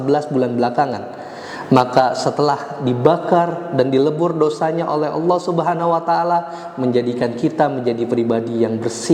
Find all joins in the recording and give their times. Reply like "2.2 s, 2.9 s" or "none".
none